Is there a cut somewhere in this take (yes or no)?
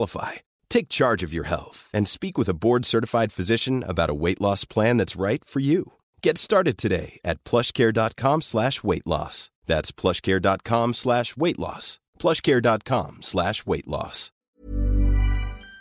yes